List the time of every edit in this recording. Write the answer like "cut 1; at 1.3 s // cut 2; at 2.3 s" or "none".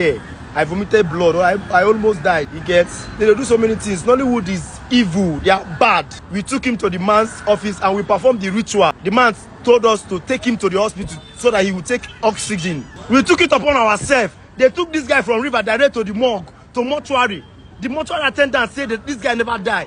cut 1; at 2.5 s // cut 2; at 6.2 s // cut 3; at 9.0 s // cut 4; at 12.9 s